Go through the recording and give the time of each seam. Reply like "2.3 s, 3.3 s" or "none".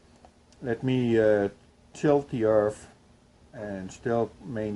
none